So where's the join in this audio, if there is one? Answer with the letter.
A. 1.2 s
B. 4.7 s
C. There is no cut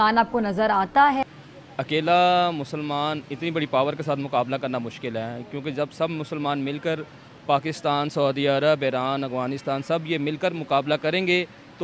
A